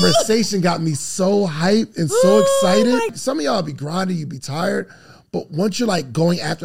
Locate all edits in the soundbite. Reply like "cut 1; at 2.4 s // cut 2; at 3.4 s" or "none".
cut 1; at 3.1 s